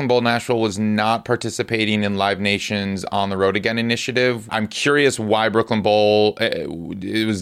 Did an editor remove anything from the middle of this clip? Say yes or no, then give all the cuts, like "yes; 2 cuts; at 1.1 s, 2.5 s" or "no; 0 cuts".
yes; 1 cut; at 4.5 s